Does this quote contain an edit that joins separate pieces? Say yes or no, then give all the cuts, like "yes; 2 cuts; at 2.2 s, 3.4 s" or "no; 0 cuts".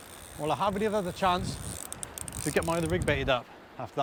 no; 0 cuts